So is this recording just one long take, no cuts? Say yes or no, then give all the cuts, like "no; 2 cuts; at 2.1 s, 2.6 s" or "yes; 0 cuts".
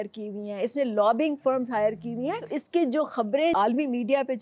no; 2 cuts; at 2.5 s, 3.5 s